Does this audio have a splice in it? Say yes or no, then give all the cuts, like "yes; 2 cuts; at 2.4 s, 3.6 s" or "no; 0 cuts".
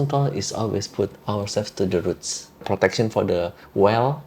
yes; 1 cut; at 2.6 s